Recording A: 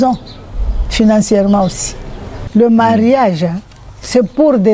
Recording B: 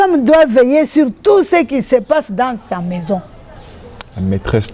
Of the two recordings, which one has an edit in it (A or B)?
A